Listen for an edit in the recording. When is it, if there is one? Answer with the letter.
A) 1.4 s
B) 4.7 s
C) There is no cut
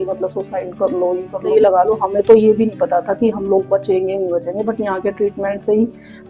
A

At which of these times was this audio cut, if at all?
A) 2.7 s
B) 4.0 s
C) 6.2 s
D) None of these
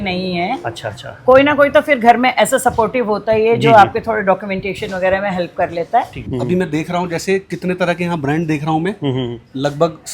C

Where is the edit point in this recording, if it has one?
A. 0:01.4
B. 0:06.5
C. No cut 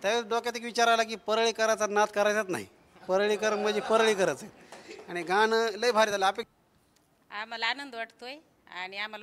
B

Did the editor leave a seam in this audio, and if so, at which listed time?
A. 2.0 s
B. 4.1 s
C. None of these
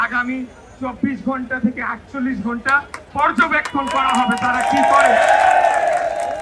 C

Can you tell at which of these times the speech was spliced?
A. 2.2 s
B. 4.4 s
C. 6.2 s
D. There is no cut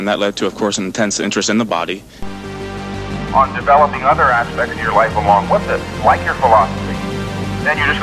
A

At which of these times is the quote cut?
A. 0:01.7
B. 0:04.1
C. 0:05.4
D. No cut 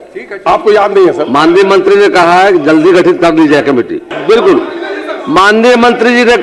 B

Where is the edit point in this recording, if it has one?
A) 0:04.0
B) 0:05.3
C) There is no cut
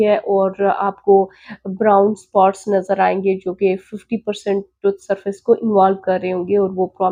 C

